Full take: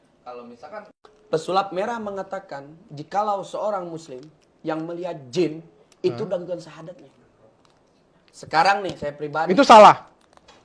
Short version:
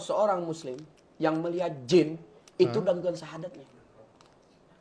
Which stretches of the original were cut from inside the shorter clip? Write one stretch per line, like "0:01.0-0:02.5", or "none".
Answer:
none